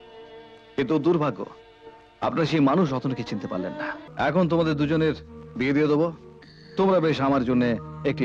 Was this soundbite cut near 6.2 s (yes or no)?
no